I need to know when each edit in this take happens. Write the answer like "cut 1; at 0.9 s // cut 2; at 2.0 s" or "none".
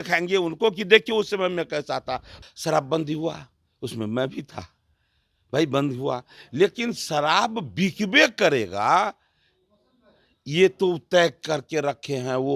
cut 1; at 2.3 s